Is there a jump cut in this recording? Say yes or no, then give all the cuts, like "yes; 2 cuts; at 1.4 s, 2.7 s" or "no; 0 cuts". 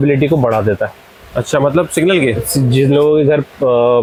no; 0 cuts